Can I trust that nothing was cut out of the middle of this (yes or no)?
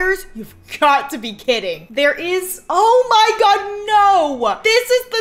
yes